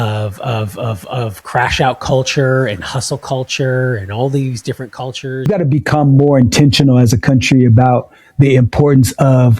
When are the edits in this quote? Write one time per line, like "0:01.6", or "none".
0:05.5